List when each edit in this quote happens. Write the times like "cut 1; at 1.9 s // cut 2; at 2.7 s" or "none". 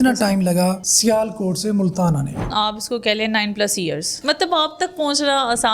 cut 1; at 2.4 s // cut 2; at 4.2 s